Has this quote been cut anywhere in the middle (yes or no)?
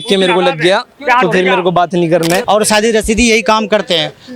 yes